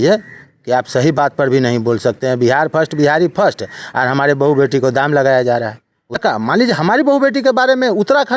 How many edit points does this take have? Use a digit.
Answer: 1